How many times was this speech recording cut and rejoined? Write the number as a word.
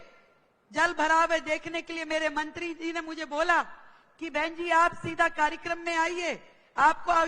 zero